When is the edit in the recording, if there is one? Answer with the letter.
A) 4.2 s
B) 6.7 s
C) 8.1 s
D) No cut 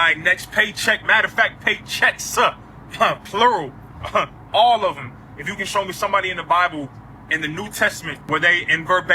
C